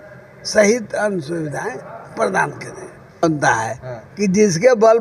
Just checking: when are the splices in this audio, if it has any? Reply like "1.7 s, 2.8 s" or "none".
3.2 s